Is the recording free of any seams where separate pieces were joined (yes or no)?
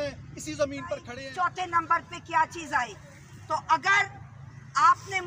no